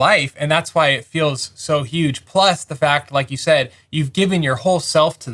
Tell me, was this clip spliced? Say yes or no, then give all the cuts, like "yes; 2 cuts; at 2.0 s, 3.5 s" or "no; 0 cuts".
no; 0 cuts